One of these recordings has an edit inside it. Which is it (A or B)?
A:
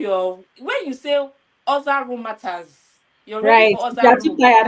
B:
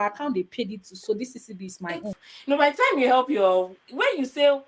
B